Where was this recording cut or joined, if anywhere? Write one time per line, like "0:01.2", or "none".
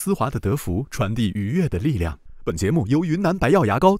0:02.3